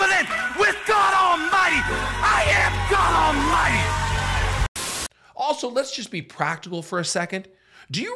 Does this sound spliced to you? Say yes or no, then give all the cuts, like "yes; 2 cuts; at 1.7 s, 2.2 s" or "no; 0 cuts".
yes; 1 cut; at 4.7 s